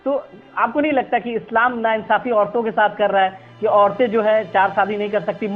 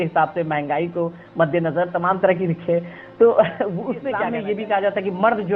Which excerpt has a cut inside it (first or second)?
second